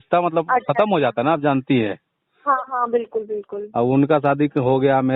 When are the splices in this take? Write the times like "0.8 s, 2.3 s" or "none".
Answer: none